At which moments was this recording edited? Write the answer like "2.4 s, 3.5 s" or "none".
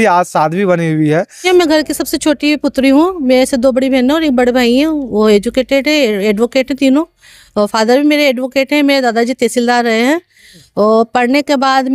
1.5 s